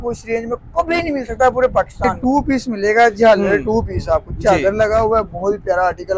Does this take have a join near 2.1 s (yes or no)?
yes